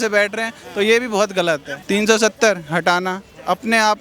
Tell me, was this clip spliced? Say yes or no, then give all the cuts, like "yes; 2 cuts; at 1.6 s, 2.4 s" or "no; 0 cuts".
yes; 1 cut; at 1.7 s